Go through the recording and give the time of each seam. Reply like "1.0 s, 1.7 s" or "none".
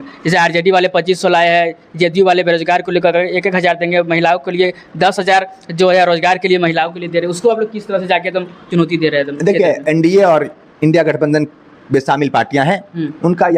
9.8 s